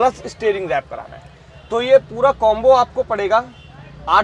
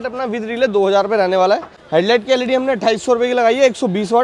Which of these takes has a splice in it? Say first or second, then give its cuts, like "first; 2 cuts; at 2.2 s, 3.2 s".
second; 1 cut; at 1.8 s